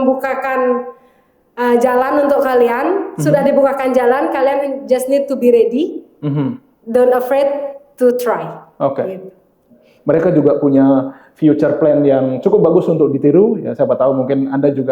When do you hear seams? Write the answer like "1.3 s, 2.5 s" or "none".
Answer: 9.9 s